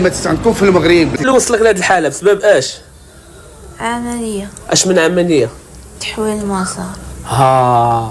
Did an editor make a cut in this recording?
yes; 1 cut; at 1.1 s

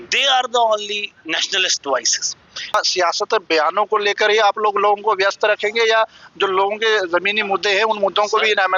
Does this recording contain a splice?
yes; 1 cut; at 2.7 s

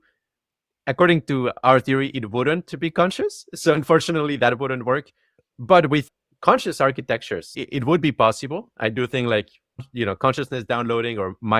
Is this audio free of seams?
no; 3 cuts; at 6.0 s, 7.6 s, 9.9 s

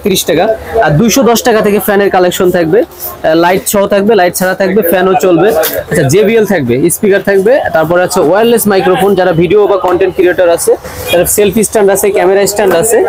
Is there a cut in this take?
no; 0 cuts

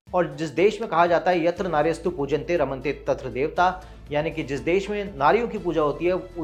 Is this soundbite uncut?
yes; 0 cuts

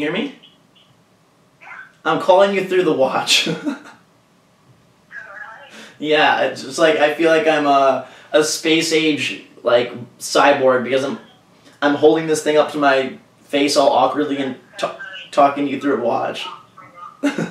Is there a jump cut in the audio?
no; 0 cuts

